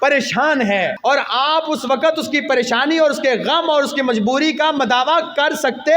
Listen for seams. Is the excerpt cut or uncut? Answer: cut